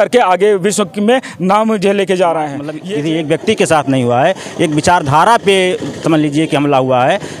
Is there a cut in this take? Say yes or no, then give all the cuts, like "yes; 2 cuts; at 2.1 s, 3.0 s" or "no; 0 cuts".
yes; 1 cut; at 2.8 s